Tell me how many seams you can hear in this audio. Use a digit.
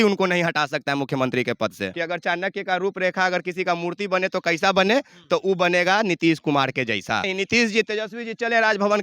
2